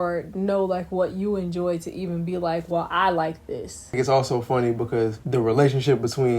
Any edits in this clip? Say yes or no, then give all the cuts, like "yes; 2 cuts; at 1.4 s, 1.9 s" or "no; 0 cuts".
yes; 2 cuts; at 4.0 s, 5.2 s